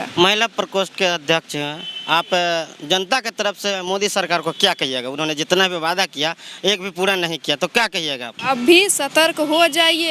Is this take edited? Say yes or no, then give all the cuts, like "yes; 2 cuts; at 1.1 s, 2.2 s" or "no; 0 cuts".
yes; 1 cut; at 8.4 s